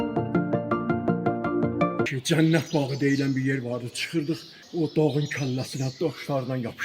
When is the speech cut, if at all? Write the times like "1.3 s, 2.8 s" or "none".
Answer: 2.1 s, 4.5 s